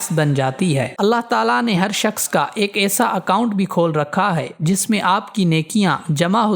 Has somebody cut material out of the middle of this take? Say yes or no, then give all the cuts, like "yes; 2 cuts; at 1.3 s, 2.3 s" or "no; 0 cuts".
no; 0 cuts